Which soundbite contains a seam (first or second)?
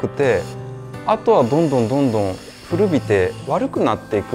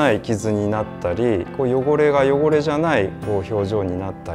first